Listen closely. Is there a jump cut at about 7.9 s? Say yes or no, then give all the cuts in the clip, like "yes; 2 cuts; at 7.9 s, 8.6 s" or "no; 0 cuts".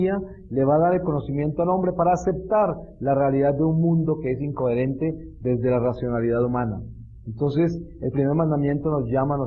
yes; 1 cut; at 7.9 s